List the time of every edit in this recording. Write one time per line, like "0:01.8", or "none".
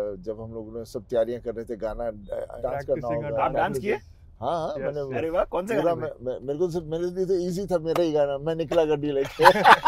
0:02.5